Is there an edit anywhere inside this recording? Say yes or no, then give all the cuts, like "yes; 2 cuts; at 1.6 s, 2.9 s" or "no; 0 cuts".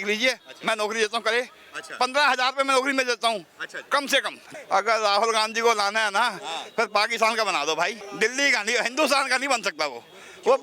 yes; 2 cuts; at 4.4 s, 8.0 s